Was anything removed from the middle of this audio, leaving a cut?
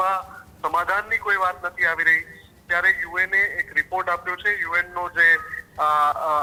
no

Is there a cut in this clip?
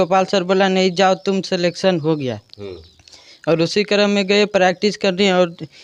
no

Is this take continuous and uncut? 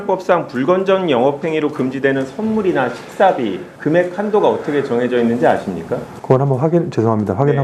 yes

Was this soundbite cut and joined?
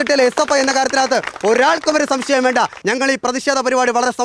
yes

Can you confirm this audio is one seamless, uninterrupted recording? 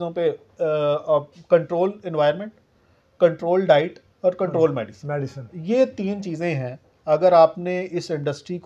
yes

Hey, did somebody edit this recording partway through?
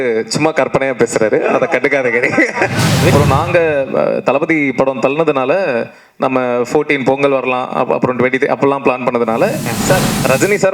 yes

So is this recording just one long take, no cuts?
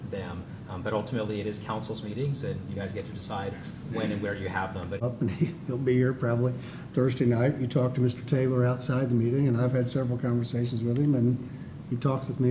no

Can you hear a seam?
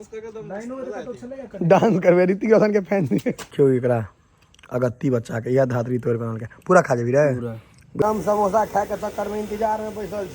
yes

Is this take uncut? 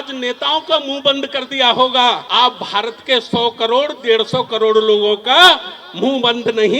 no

